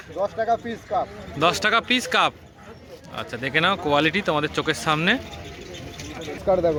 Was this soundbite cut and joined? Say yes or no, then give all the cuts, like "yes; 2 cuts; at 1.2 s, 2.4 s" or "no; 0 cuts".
no; 0 cuts